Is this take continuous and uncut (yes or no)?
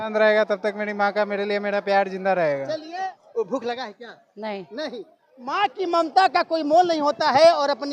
no